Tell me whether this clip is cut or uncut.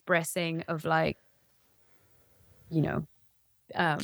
uncut